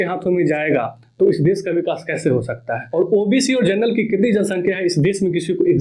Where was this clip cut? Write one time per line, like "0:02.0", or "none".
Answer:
0:02.8